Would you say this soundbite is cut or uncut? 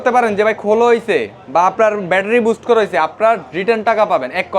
uncut